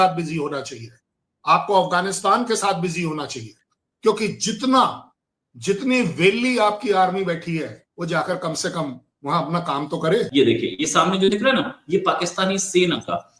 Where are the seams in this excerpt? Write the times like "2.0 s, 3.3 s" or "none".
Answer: 10.3 s